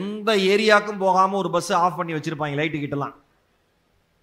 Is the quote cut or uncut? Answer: uncut